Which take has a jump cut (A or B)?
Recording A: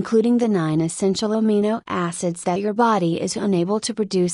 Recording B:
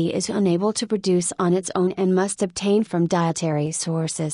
A